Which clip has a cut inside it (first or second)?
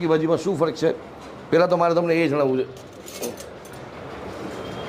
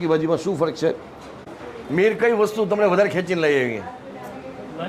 second